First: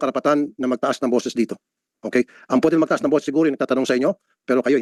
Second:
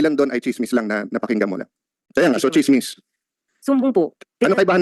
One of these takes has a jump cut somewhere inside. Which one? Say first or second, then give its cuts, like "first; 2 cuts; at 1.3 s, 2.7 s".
second; 1 cut; at 2.0 s